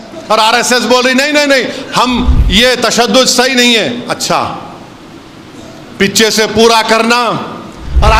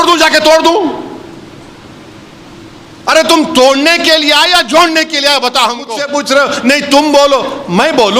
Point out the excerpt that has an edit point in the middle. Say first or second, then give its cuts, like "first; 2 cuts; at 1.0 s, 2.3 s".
second; 1 cut; at 6.0 s